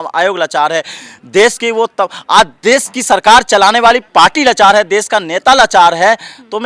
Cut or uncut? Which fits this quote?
uncut